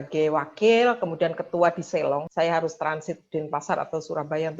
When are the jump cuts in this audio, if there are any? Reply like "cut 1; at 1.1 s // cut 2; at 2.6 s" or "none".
cut 1; at 2.3 s